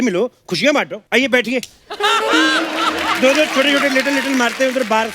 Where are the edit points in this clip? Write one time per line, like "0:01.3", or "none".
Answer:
0:01.0